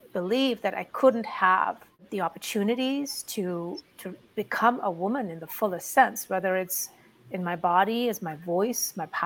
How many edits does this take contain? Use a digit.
1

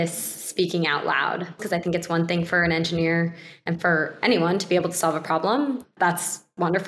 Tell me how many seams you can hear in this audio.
2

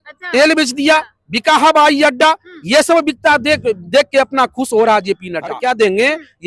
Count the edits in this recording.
1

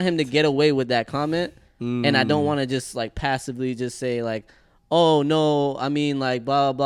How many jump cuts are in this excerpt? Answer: 0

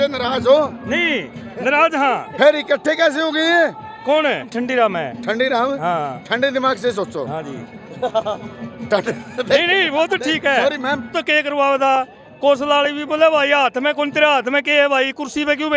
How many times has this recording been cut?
2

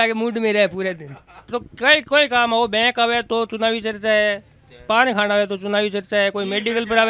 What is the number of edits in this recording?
1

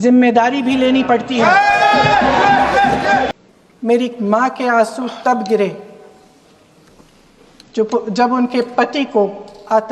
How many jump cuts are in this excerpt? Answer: 1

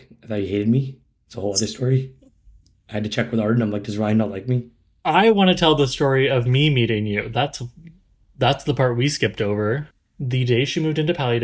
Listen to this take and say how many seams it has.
1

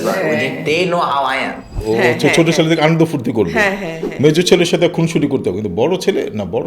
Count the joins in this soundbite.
1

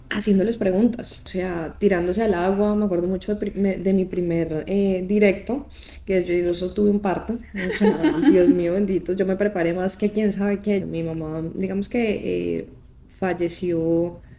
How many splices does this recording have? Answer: 2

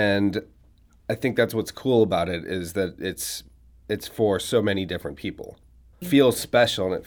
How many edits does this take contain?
1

